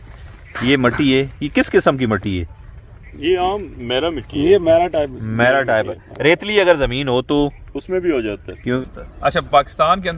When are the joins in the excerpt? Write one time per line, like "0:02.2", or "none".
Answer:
0:08.8